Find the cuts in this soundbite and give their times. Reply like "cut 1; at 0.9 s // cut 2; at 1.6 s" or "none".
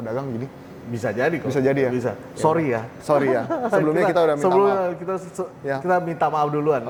none